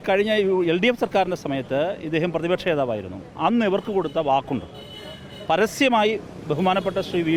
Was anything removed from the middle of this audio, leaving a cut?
no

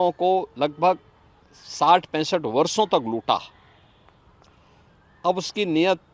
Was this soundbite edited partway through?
no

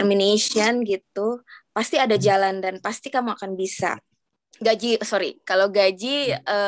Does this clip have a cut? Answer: yes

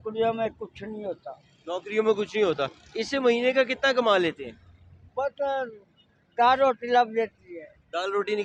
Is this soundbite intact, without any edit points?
yes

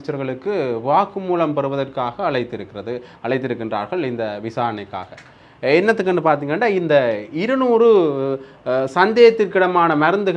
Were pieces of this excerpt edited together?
no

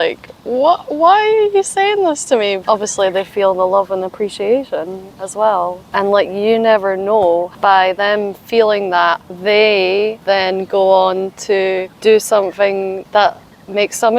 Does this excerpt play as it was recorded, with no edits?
no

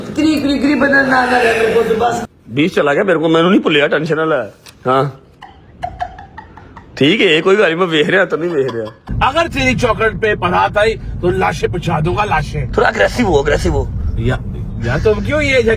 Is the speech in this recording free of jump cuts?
no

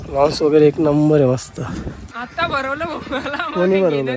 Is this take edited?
yes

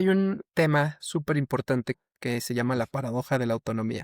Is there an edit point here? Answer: yes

